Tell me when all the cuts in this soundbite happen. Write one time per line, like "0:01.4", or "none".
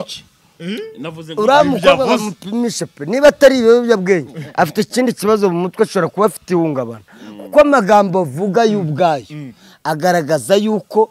none